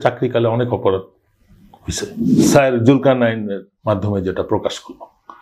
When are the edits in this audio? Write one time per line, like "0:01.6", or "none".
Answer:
0:02.3